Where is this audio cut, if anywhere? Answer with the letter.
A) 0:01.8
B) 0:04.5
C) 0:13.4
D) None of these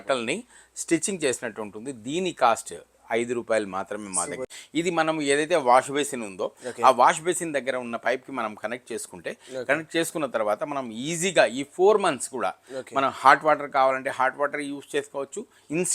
B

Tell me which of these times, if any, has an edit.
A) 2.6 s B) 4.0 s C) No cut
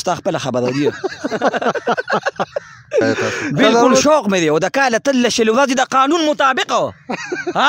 B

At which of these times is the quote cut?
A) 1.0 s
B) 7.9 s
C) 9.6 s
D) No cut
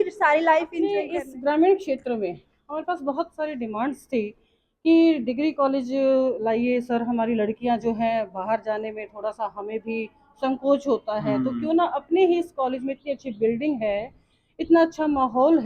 A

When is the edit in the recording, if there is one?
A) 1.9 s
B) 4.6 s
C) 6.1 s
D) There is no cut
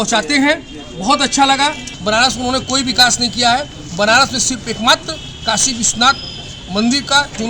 A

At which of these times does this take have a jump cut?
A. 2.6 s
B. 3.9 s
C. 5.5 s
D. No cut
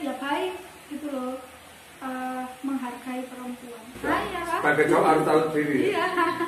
B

